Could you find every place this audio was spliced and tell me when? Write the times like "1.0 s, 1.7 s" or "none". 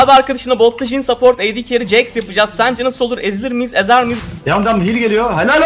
4.2 s